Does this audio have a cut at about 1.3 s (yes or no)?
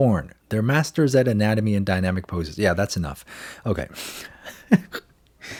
no